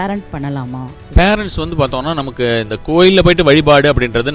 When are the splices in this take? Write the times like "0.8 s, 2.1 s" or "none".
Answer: 0.9 s

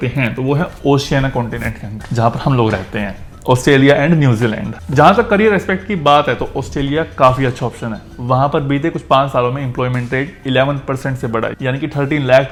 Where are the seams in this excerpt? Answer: none

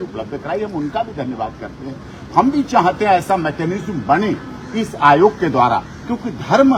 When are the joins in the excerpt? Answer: none

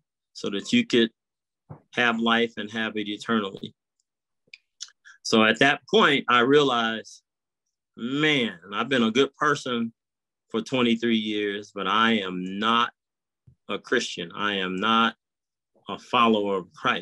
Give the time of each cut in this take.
none

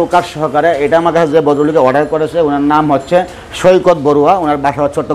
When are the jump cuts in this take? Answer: none

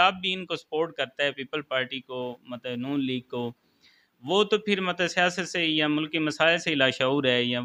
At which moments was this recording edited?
none

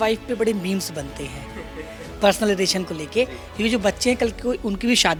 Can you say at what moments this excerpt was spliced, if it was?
none

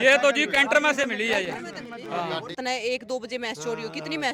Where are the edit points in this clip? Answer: 2.6 s

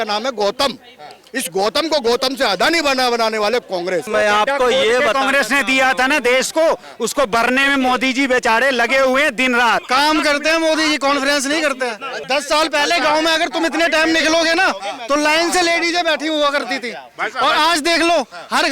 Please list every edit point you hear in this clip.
4.1 s, 9.8 s, 12.1 s

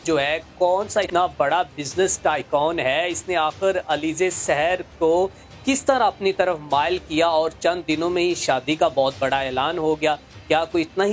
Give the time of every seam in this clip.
1.1 s

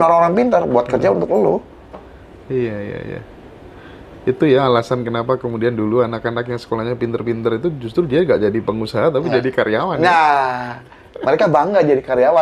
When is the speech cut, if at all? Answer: none

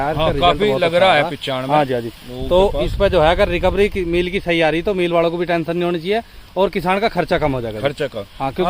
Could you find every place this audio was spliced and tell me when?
none

